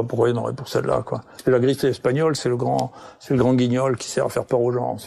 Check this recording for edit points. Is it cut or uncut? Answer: cut